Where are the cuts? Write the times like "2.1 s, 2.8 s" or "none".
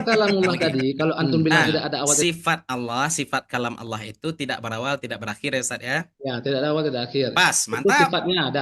2.2 s